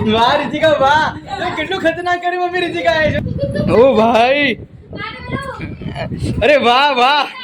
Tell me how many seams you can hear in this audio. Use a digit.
1